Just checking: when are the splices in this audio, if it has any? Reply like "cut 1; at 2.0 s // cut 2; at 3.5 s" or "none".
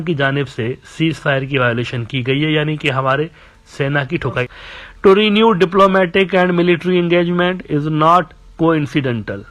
cut 1; at 4.5 s